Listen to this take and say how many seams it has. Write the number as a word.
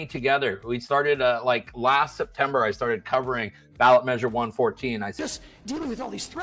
one